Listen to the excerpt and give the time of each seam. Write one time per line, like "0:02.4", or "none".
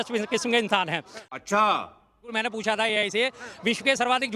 0:01.1
0:02.4